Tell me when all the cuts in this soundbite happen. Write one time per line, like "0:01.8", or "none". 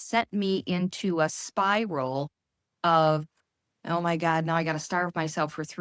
none